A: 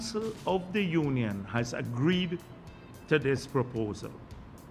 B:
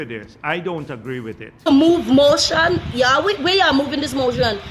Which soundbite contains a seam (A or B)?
B